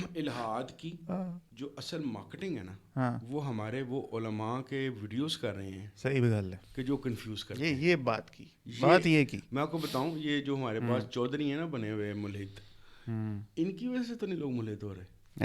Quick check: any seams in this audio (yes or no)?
yes